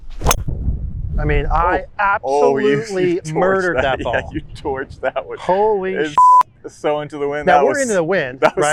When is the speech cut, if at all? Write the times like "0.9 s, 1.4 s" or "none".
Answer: none